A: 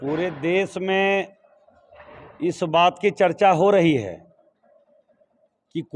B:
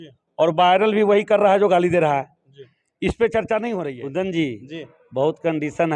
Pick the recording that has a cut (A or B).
B